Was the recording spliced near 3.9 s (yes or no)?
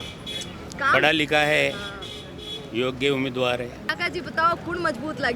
yes